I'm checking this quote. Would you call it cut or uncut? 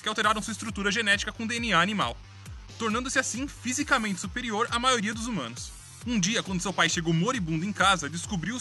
uncut